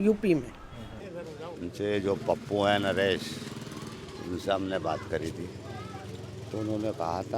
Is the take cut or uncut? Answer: cut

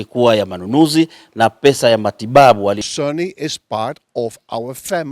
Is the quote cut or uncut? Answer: cut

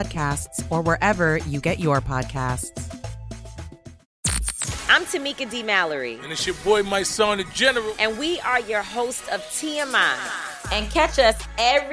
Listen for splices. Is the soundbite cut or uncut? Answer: cut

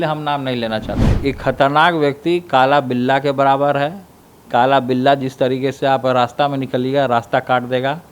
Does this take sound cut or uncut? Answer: cut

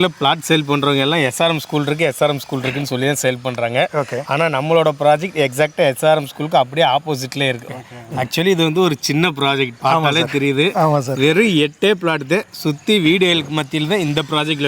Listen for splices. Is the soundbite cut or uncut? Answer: uncut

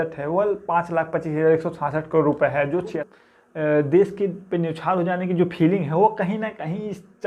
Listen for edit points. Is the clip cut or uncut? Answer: cut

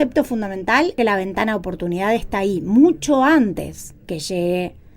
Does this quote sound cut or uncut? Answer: cut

